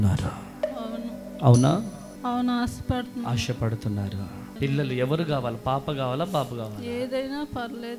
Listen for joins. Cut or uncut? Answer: cut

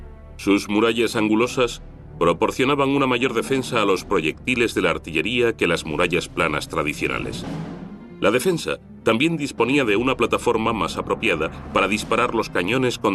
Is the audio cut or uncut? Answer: uncut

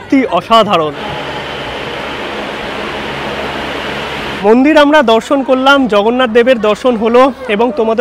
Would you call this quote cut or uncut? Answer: cut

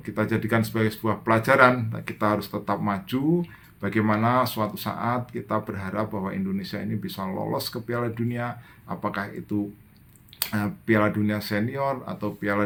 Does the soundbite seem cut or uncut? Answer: uncut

